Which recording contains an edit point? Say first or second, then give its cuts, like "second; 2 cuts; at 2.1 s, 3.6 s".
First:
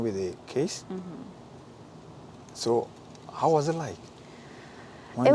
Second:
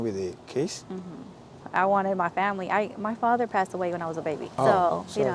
second; 2 cuts; at 1.6 s, 4.5 s